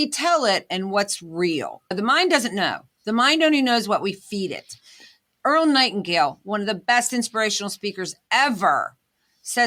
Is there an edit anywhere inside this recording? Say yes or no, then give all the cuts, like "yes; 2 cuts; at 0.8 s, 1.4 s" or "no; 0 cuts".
no; 0 cuts